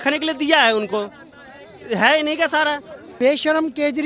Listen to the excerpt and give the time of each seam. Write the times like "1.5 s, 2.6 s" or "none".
3.2 s